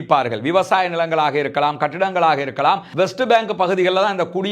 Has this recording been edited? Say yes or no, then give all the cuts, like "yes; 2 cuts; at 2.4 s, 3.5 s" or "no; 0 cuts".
yes; 1 cut; at 2.9 s